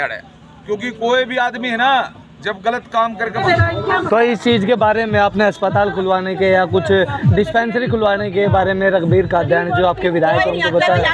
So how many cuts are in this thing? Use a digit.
1